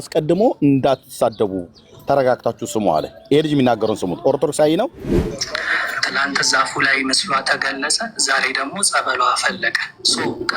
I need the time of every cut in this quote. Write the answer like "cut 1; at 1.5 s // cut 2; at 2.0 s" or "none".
cut 1; at 5.1 s